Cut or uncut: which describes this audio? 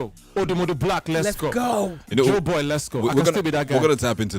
uncut